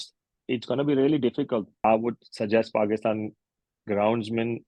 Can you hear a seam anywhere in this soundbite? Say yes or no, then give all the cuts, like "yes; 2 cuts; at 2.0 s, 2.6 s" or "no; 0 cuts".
yes; 1 cut; at 1.7 s